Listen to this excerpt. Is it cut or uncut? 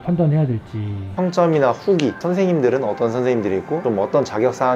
cut